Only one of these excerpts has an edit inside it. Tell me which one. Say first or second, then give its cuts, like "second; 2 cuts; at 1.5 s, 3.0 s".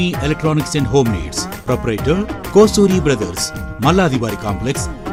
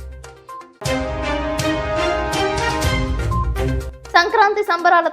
second; 1 cut; at 3.9 s